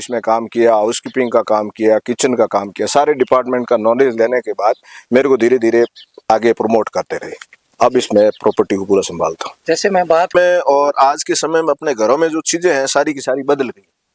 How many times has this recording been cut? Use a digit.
1